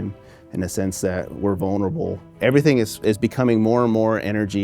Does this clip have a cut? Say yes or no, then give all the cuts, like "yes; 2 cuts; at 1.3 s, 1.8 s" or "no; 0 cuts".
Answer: yes; 1 cut; at 2.3 s